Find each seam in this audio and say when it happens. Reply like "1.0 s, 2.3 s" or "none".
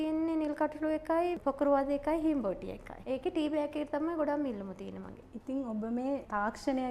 none